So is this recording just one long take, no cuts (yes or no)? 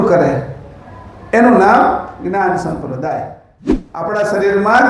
no